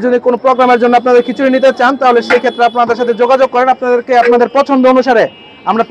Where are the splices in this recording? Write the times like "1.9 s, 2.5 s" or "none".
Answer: none